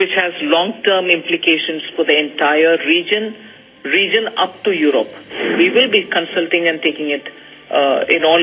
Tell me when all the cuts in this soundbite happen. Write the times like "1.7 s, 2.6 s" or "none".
5.3 s